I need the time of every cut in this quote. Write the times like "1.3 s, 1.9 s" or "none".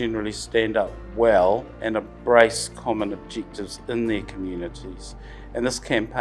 1.0 s, 1.8 s